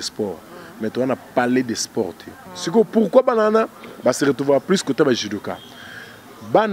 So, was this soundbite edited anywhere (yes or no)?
yes